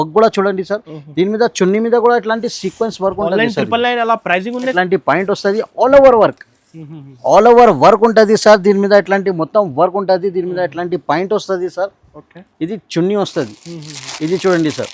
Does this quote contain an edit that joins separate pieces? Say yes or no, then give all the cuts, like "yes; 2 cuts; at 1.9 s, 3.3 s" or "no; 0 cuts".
yes; 1 cut; at 4.7 s